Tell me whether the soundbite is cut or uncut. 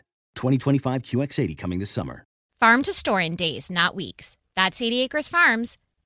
cut